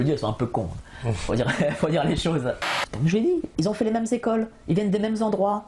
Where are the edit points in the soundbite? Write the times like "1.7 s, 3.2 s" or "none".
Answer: 2.6 s